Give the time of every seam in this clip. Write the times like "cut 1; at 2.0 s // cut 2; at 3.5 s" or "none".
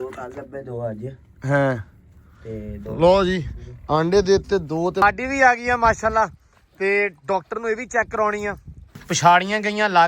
cut 1; at 5.0 s // cut 2; at 9.0 s

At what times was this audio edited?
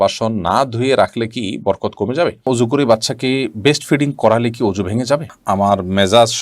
cut 1; at 2.5 s // cut 2; at 5.3 s

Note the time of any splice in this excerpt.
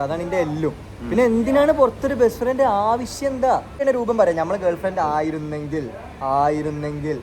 cut 1; at 3.8 s

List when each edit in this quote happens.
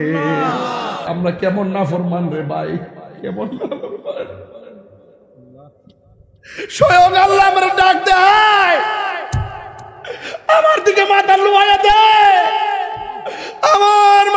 cut 1; at 1.0 s

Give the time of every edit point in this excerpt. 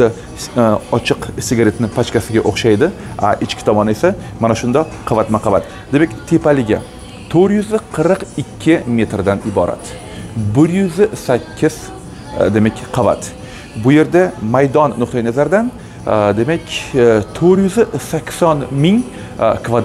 none

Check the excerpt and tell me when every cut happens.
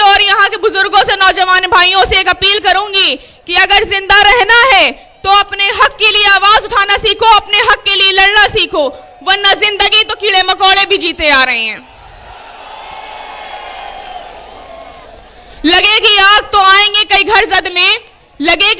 none

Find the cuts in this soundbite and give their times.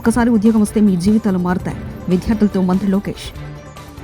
none

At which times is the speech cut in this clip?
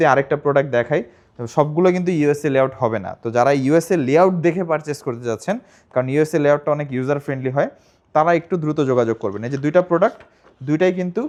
none

